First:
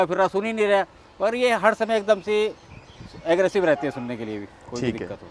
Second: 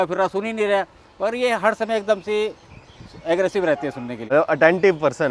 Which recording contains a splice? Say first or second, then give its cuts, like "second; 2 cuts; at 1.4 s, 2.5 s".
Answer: second; 1 cut; at 4.2 s